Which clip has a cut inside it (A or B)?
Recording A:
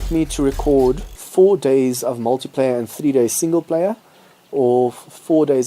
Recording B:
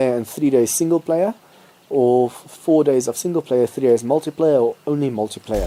A